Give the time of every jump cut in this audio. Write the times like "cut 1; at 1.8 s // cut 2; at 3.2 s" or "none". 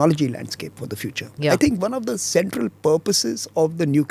cut 1; at 1.4 s